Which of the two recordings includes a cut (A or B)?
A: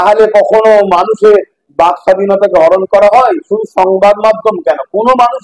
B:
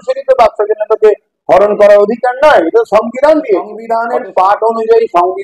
B